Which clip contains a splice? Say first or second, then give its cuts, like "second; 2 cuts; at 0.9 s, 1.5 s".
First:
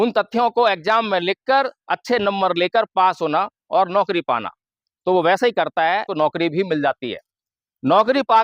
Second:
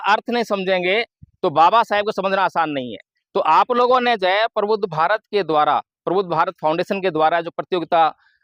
first; 1 cut; at 6.1 s